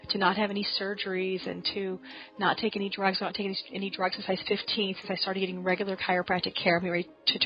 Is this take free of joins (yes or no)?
yes